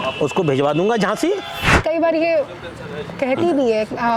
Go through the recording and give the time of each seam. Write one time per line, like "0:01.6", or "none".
0:01.8